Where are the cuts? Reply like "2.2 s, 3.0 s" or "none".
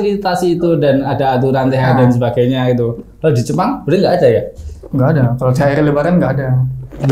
none